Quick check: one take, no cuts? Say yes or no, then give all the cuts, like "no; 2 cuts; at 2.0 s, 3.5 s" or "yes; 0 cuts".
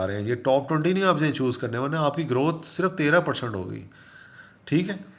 yes; 0 cuts